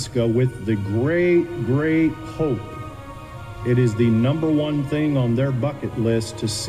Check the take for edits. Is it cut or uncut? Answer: uncut